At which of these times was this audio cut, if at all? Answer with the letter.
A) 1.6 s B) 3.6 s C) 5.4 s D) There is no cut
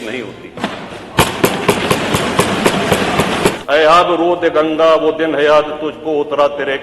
B